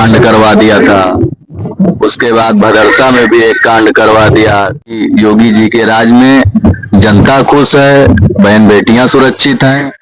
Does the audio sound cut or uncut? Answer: cut